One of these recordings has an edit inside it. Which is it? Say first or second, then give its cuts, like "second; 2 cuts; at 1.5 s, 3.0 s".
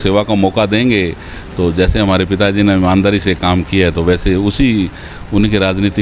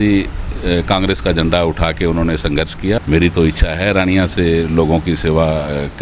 second; 1 cut; at 3.0 s